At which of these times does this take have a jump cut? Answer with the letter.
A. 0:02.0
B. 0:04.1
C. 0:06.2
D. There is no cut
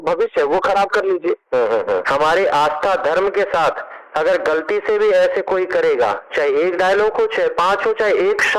A